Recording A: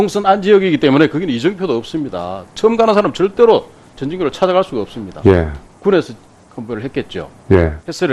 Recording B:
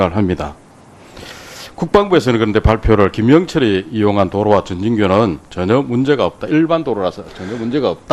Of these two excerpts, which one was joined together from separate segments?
B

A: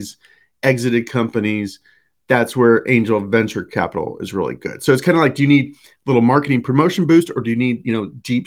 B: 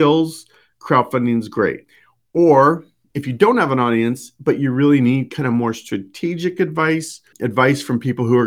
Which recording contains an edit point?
B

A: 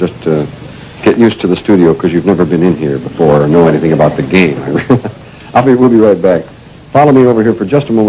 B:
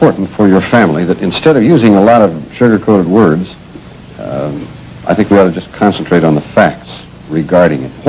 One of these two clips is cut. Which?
A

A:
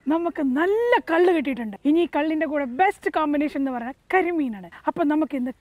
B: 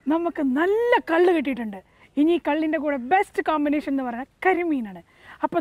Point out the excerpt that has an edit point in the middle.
A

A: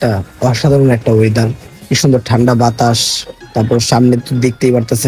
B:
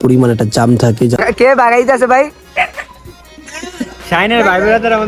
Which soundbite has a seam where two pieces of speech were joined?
B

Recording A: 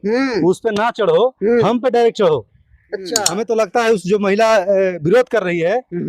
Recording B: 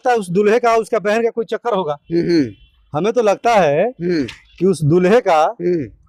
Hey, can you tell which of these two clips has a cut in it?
A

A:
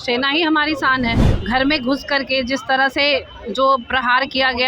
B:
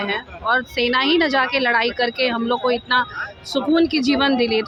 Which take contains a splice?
A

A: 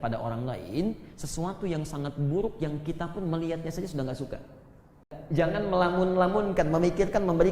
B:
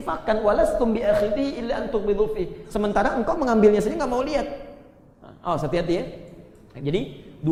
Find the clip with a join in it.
A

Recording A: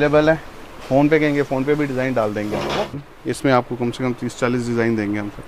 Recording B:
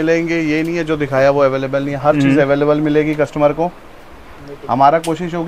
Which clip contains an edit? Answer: A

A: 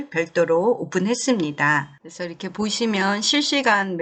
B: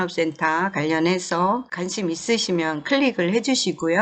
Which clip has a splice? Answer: B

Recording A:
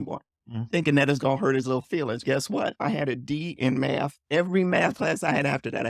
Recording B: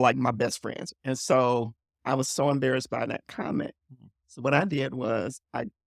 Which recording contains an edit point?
A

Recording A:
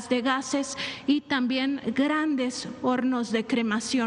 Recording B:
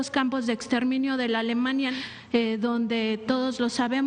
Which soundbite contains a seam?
B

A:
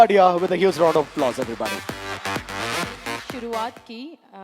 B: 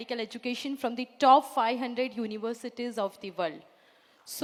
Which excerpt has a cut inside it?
A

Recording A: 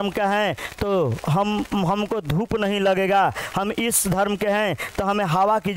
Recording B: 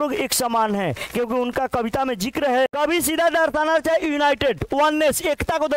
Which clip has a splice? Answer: B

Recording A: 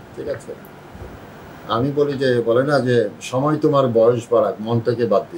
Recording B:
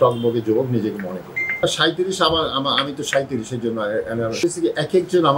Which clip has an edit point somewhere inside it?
B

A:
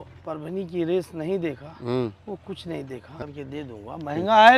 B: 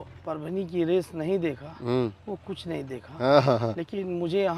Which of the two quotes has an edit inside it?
A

